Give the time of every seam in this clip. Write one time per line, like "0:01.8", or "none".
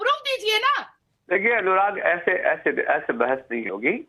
0:00.9

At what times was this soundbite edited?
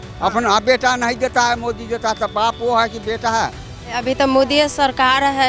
0:04.0

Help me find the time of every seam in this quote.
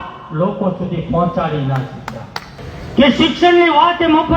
0:02.5

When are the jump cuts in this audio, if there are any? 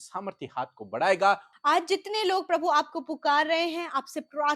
0:01.5

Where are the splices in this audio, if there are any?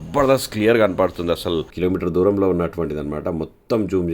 0:01.7

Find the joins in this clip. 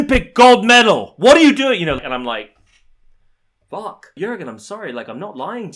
0:02.0
0:04.2

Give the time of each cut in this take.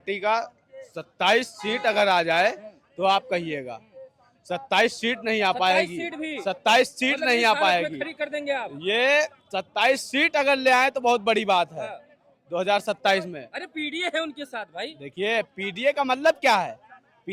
none

